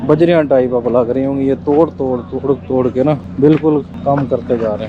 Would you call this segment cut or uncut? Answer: cut